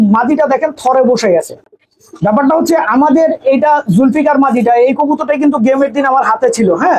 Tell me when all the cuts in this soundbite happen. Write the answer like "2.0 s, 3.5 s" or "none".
none